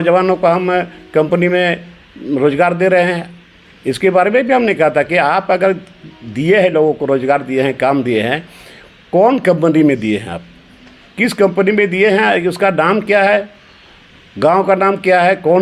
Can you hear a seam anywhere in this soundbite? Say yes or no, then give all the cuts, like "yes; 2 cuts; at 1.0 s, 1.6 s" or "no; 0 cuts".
no; 0 cuts